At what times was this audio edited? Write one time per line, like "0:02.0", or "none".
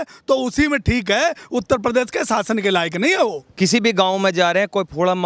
0:03.4